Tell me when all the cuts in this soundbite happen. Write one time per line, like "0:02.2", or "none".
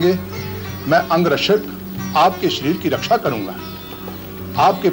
none